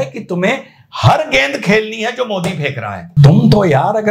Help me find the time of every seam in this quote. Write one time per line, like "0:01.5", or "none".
0:03.1

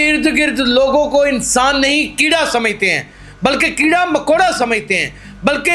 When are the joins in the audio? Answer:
none

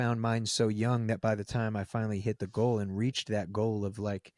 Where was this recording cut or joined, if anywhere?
none

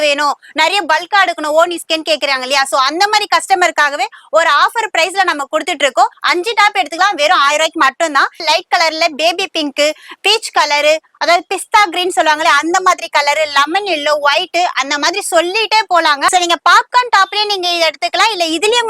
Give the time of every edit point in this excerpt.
0:06.2
0:08.4
0:16.3

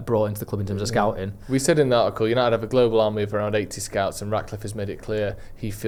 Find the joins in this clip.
none

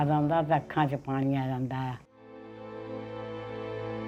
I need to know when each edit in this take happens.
0:02.6

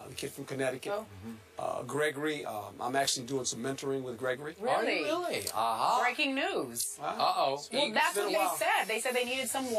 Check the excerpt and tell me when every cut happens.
0:07.1

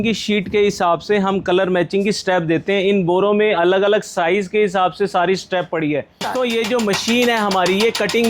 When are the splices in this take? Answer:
0:06.2

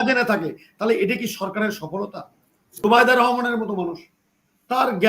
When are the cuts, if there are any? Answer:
0:02.7

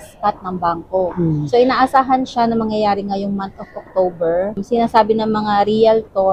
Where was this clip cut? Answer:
none

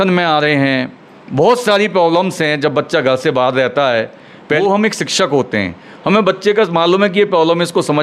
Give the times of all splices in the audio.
0:04.6

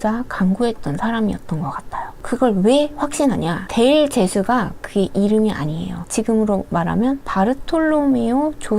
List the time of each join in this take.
none

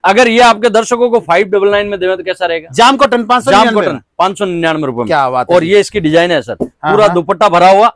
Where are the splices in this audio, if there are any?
none

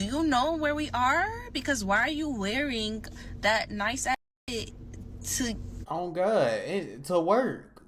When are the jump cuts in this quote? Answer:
none

